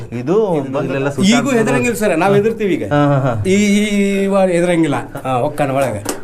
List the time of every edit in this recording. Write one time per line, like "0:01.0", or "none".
0:00.8
0:05.1